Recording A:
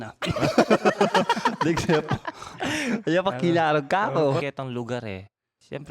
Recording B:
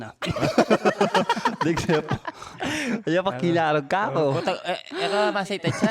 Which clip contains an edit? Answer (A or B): A